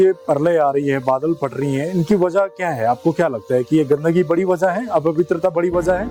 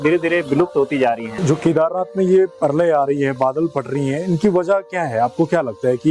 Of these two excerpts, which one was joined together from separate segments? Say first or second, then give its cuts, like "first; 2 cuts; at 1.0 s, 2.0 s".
second; 1 cut; at 1.3 s